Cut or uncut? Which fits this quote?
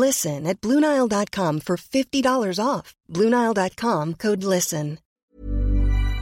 cut